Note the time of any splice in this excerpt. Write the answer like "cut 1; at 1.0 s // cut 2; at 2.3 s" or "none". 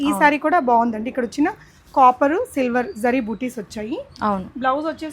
none